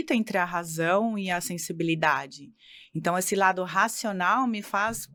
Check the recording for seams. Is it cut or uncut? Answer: uncut